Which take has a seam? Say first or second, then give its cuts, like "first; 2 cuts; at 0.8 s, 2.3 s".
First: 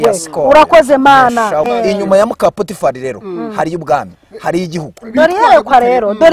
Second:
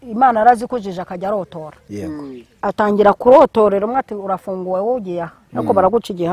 first; 1 cut; at 1.7 s